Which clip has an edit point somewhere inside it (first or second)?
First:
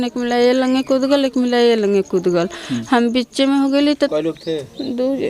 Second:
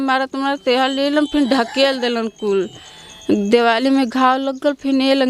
first